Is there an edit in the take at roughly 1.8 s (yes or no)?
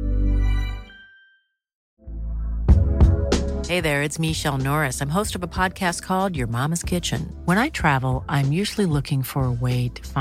yes